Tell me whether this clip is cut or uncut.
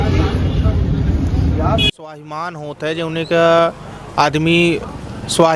cut